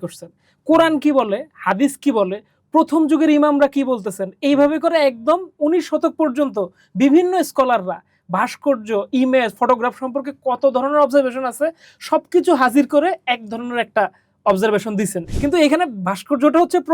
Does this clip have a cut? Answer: yes; 1 cut; at 15.2 s

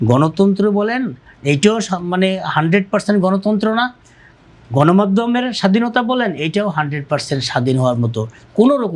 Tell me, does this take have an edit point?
no; 0 cuts

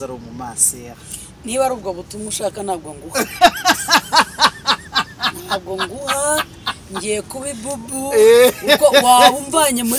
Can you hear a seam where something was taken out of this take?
no; 0 cuts

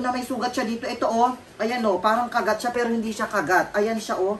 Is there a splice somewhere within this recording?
no; 0 cuts

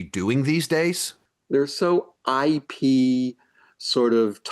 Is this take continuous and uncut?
no; 1 cut; at 1.2 s

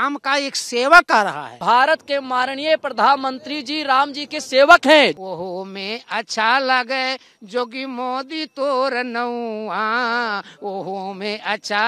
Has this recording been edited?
yes; 2 cuts; at 1.5 s, 5.2 s

